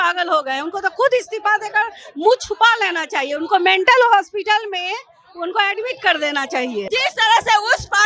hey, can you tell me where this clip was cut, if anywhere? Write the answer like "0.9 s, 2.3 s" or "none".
6.8 s